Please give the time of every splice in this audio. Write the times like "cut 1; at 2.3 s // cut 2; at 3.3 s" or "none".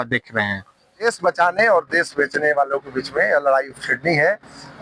cut 1; at 1.0 s